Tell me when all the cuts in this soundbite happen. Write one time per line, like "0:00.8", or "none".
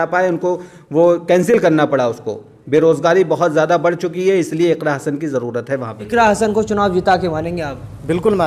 0:06.1